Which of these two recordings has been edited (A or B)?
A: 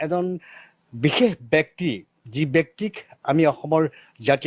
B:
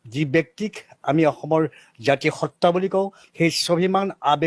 B